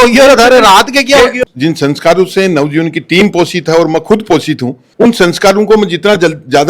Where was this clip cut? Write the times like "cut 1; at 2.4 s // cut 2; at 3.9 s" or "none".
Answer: cut 1; at 1.4 s